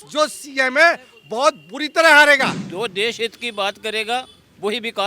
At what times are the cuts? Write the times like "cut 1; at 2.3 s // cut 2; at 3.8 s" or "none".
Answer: cut 1; at 2.6 s